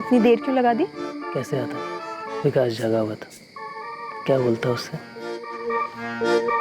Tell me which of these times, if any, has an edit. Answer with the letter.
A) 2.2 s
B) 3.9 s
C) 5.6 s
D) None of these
C